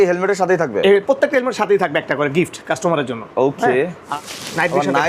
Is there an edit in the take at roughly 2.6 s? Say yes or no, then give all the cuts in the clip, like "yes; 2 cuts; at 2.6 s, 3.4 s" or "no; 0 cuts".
no; 1 cut; at 4.0 s